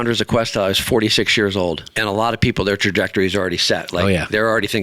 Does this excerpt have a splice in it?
yes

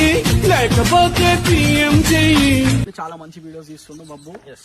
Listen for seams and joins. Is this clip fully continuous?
no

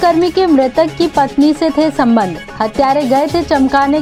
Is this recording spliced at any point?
no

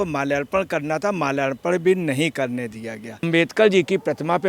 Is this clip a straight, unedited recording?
no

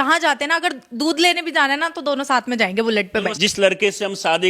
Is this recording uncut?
no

